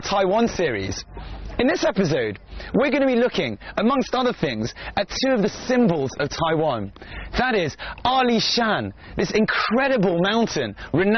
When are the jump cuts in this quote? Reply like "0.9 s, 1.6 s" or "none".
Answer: 8.4 s